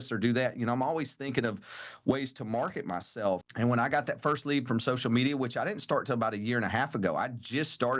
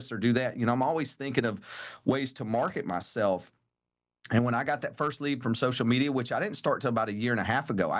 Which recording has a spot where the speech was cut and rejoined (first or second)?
first